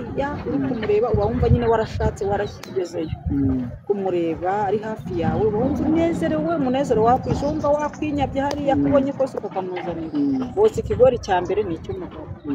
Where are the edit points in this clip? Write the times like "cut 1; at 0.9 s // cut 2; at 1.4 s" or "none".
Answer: none